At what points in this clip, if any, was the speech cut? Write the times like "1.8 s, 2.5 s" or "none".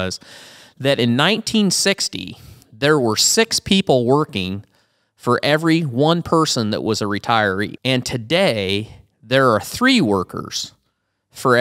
7.8 s